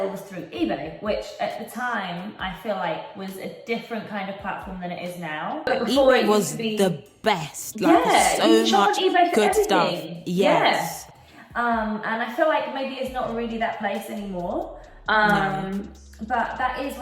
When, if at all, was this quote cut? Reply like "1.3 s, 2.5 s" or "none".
5.7 s